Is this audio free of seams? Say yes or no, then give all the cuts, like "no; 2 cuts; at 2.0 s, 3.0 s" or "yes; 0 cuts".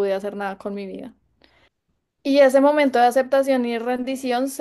yes; 0 cuts